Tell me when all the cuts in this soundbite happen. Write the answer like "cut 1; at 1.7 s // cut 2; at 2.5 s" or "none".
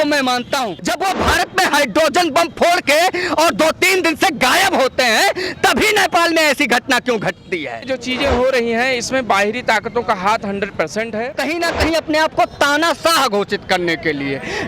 cut 1; at 0.8 s // cut 2; at 7.9 s // cut 3; at 11.4 s

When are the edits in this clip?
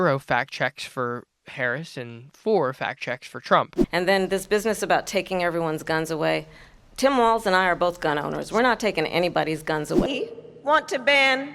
cut 1; at 3.7 s // cut 2; at 10.1 s

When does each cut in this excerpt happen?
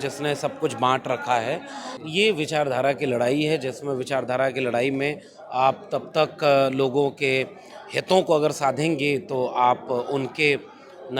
cut 1; at 1.9 s

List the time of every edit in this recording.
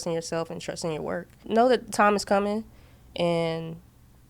cut 1; at 1.5 s

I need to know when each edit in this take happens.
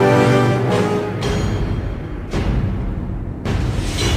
cut 1; at 2.7 s

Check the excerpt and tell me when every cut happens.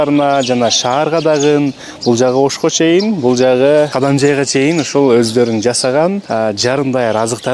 cut 1; at 3.9 s // cut 2; at 6.2 s

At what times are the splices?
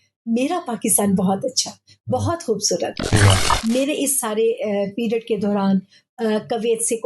cut 1; at 3.5 s

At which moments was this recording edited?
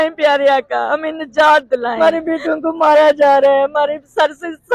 cut 1; at 2.0 s

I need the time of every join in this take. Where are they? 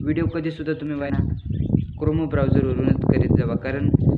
cut 1; at 1.0 s

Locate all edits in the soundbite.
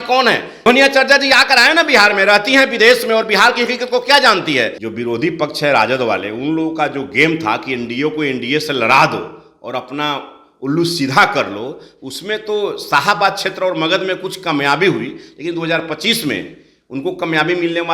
cut 1; at 0.7 s // cut 2; at 4.8 s

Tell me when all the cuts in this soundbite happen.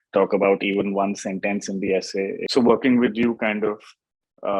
cut 1; at 2.4 s

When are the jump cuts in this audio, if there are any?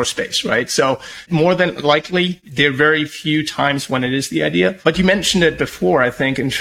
cut 1; at 1.2 s // cut 2; at 2.4 s // cut 3; at 4.8 s

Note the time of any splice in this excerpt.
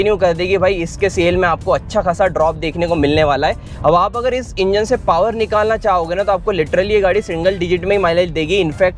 cut 1; at 3.7 s

